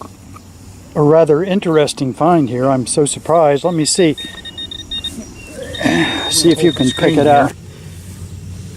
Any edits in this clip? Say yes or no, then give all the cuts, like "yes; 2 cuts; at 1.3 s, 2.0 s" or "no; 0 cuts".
yes; 1 cut; at 7.5 s